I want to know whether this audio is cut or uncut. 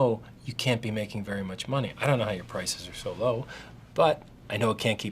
cut